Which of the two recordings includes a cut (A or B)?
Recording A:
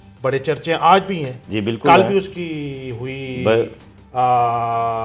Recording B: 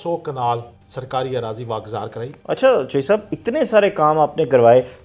B